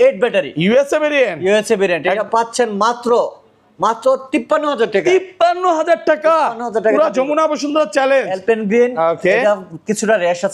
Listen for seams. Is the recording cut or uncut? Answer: uncut